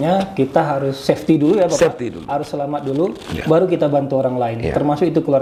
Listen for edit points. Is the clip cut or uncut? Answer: uncut